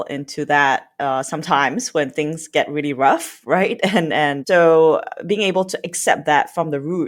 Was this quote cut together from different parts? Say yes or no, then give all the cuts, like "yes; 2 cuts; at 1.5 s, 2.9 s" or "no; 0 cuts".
yes; 1 cut; at 4.4 s